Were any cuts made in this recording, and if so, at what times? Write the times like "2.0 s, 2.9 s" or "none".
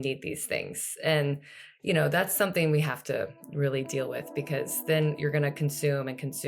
5.2 s